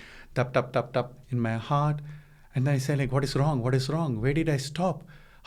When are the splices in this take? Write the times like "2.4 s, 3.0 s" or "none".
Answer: none